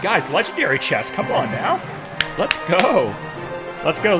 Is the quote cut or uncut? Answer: uncut